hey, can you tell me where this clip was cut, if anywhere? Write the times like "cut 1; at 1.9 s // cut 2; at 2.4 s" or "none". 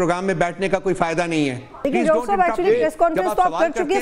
cut 1; at 1.8 s